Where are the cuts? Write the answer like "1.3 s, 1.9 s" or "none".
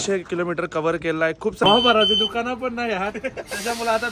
1.6 s